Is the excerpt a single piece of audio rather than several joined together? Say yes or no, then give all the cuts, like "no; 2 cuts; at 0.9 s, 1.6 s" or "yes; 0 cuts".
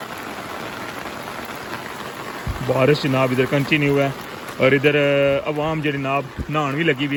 yes; 0 cuts